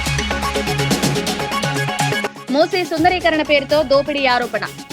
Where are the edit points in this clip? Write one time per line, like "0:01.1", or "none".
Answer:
0:01.8